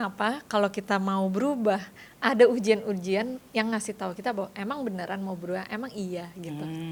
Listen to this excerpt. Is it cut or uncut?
uncut